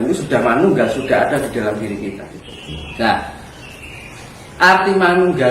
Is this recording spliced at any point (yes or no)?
yes